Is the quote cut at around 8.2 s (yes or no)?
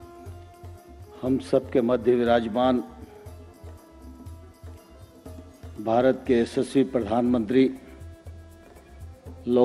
no